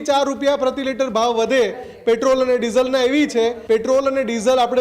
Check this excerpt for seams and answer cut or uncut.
cut